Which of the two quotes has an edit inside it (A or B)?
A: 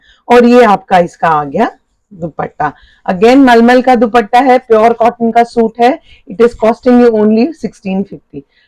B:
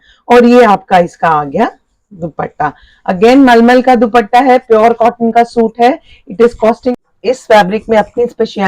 B